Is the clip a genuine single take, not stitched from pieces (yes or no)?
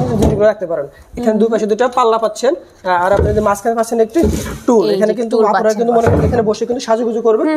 yes